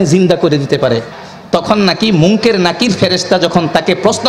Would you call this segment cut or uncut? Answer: cut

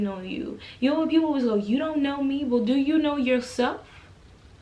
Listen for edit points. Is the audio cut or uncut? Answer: uncut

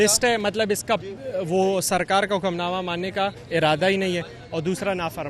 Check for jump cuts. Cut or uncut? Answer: uncut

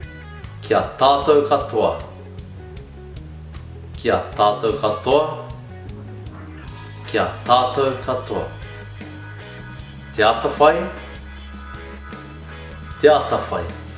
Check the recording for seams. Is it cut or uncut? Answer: cut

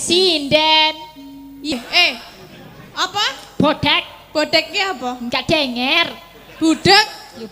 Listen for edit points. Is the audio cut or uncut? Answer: cut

